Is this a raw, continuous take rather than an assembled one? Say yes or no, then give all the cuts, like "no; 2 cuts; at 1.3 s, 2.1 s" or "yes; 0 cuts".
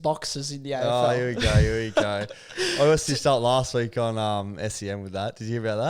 yes; 0 cuts